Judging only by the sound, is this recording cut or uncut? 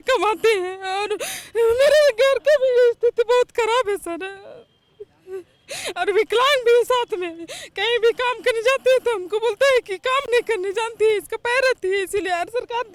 uncut